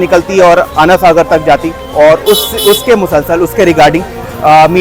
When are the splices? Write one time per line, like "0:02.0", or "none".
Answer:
none